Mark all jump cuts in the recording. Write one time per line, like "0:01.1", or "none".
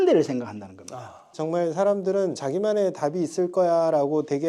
0:01.2
0:02.4